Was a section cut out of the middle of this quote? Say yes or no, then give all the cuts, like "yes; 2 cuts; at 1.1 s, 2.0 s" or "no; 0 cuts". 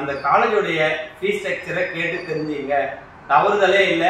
no; 0 cuts